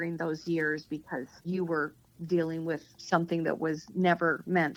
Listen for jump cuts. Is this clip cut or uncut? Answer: uncut